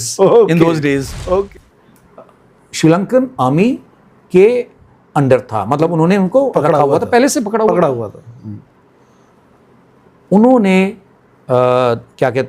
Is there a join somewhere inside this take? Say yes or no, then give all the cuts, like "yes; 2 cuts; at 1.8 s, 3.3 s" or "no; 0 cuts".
yes; 1 cut; at 1.5 s